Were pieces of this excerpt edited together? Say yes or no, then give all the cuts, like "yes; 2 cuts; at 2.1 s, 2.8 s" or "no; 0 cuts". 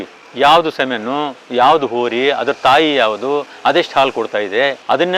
no; 0 cuts